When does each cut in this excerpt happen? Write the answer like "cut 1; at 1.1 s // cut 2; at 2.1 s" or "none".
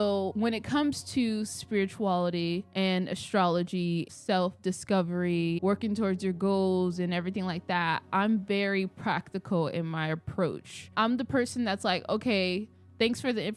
cut 1; at 5.6 s